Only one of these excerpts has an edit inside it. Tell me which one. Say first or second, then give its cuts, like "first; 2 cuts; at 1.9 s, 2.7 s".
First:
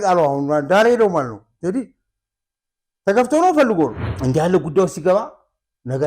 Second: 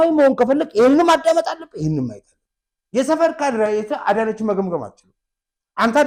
first; 1 cut; at 4.1 s